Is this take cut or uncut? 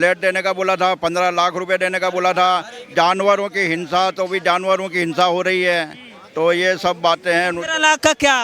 uncut